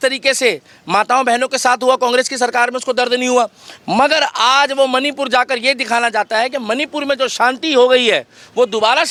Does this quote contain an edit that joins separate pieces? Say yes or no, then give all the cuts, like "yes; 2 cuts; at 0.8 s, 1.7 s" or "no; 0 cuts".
no; 0 cuts